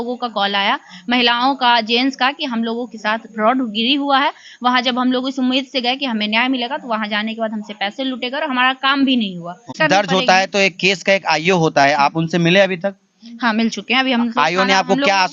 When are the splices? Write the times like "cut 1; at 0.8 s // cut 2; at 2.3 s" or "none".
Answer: cut 1; at 9.7 s